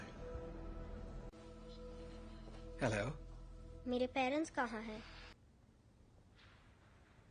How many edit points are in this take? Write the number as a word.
one